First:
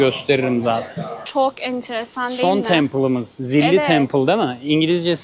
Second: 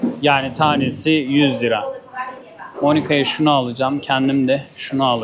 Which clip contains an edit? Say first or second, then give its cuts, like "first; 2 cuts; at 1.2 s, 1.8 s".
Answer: first; 1 cut; at 1.2 s